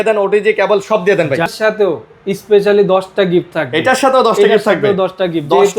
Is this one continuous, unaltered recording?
no; 1 cut; at 1.5 s

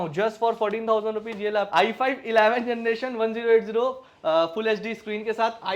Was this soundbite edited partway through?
yes; 1 cut; at 1.7 s

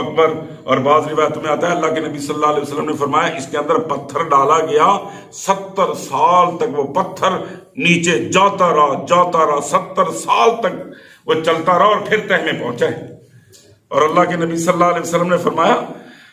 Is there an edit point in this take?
no; 0 cuts

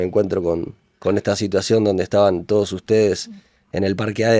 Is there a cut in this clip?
no; 0 cuts

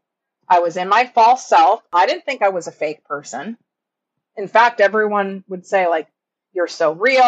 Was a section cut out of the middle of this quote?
yes; 1 cut; at 1.8 s

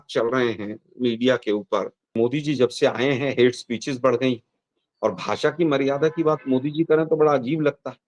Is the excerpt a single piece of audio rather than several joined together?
no; 1 cut; at 2.0 s

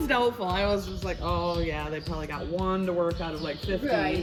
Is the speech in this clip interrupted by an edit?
no; 0 cuts

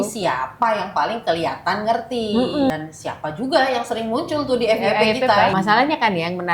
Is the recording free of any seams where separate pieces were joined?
no; 2 cuts; at 2.7 s, 5.5 s

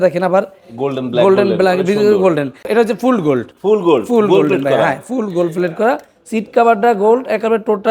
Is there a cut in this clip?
yes; 1 cut; at 2.6 s

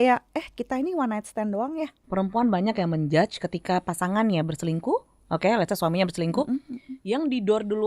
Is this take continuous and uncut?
no; 1 cut; at 2.0 s

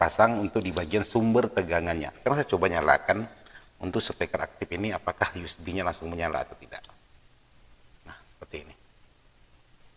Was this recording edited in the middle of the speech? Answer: yes; 1 cut; at 2.1 s

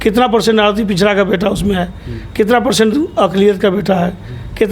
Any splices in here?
no; 0 cuts

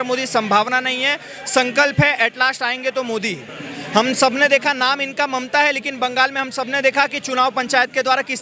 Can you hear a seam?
no; 0 cuts

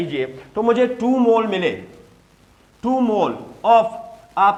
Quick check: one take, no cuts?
yes; 0 cuts

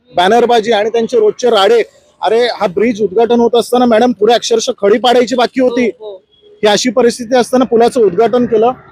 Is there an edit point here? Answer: no; 0 cuts

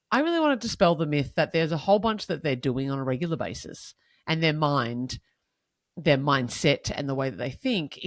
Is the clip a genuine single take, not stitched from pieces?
yes; 0 cuts

